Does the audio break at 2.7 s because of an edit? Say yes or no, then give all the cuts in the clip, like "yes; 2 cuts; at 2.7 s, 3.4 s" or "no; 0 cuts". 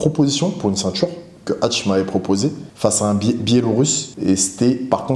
yes; 2 cuts; at 2.7 s, 4.1 s